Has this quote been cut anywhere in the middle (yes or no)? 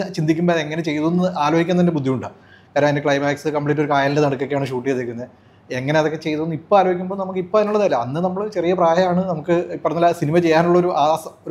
no